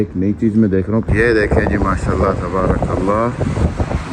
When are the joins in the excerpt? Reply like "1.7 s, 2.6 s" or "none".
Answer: 1.1 s